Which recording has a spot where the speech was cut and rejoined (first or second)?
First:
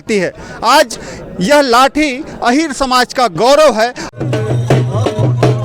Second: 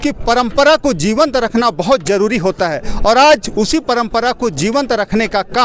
first